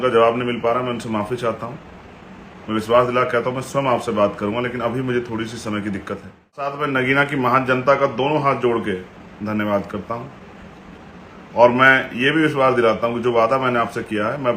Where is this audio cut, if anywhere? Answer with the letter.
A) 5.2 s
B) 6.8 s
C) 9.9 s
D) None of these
B